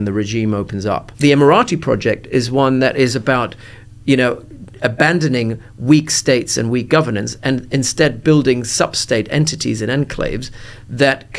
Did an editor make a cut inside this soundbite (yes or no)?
yes